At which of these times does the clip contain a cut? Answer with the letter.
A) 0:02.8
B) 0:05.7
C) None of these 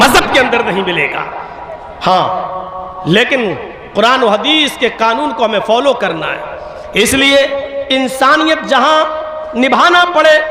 C